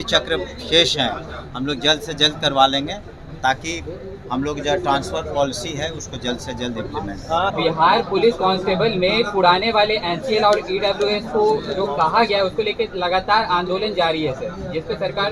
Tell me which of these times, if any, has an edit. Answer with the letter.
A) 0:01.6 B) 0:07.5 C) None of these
B